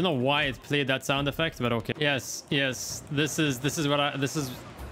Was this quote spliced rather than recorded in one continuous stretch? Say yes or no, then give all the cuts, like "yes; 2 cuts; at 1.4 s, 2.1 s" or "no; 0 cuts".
yes; 1 cut; at 1.9 s